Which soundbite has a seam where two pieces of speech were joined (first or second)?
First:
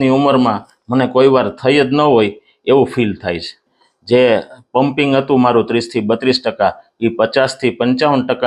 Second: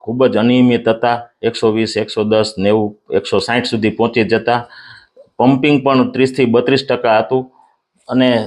first